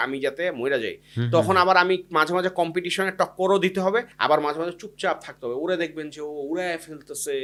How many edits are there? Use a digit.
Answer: 0